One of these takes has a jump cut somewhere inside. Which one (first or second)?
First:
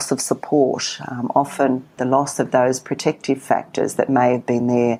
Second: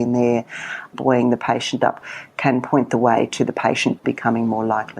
second